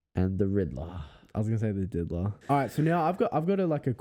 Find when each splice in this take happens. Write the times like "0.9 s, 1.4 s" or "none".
2.3 s